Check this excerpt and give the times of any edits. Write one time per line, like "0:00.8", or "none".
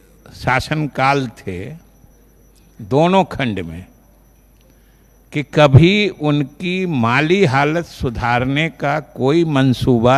none